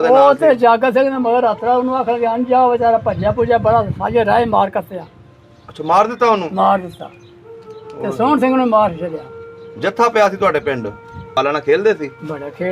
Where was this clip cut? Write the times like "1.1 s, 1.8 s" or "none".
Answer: 11.3 s